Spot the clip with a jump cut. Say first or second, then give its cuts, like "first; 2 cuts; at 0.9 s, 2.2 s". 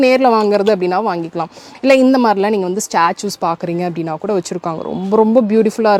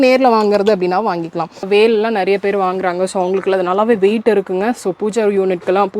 second; 1 cut; at 1.6 s